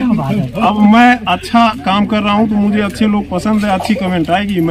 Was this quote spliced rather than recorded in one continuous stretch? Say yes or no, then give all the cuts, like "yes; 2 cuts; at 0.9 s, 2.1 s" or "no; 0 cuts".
no; 0 cuts